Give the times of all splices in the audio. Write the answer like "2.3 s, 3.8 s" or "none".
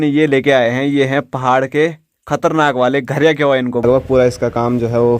3.9 s